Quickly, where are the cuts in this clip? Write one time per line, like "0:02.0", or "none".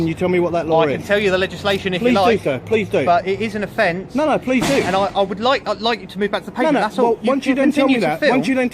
0:04.0